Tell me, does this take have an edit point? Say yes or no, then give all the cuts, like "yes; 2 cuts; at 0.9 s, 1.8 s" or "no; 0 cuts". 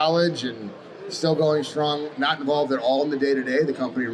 no; 0 cuts